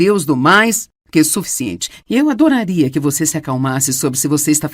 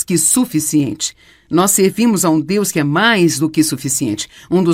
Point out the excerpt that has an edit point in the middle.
second; 1 cut; at 2.2 s

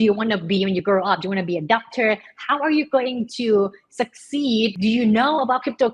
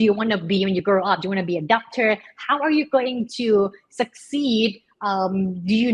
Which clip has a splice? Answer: first; 1 cut; at 4.8 s

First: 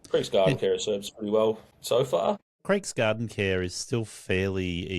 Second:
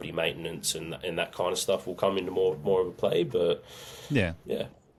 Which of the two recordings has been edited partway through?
first; 2 cuts; at 1.7 s, 2.5 s

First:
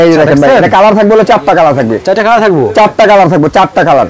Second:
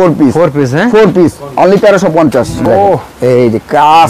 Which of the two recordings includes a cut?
second; 1 cut; at 2.7 s

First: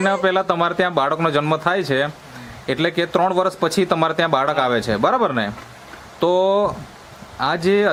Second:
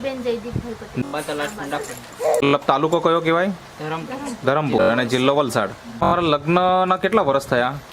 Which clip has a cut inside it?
second; 3 cuts; at 1.0 s, 2.5 s, 6.1 s

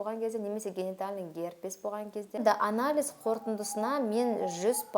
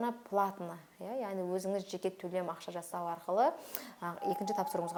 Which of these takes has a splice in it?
first; 1 cut; at 2.4 s

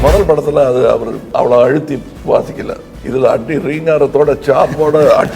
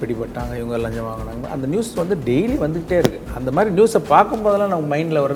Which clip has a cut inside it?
first; 3 cuts; at 1.2 s, 2.1 s, 2.9 s

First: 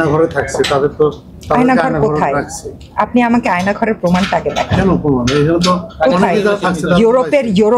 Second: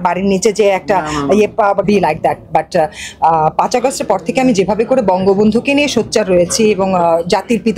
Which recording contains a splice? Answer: second; 1 cut; at 1.8 s

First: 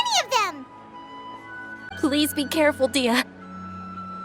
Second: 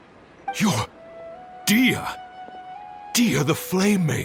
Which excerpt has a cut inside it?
first; 1 cut; at 1.9 s

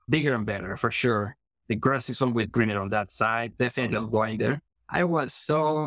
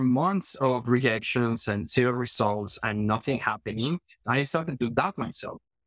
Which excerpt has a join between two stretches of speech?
first; 1 cut; at 4.7 s

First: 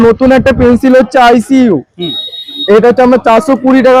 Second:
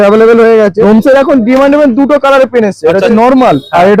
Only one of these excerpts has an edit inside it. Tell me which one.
second; 2 cuts; at 0.8 s, 3.1 s

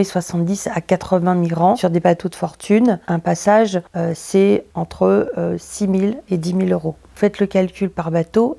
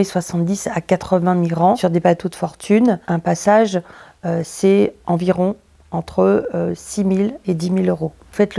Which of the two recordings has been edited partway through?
first; 2 cuts; at 3.9 s, 4.7 s

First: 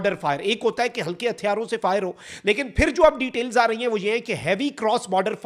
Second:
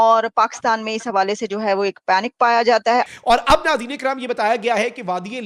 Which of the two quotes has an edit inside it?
second; 1 cut; at 3.1 s

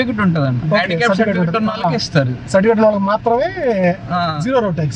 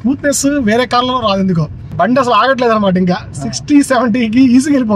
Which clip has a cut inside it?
second; 1 cut; at 1.8 s

